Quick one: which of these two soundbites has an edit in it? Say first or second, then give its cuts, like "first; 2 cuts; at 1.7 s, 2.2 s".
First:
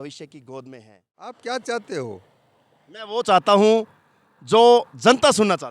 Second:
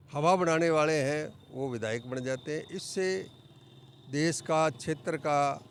first; 1 cut; at 1.4 s